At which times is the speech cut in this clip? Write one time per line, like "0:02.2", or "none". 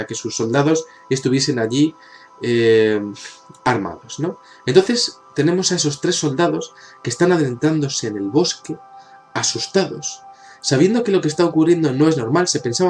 0:09.2